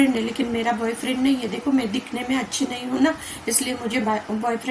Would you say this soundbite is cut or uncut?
uncut